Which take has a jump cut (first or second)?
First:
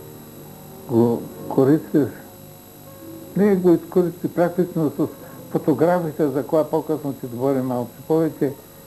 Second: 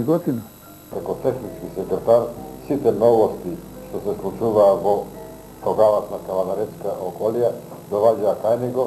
second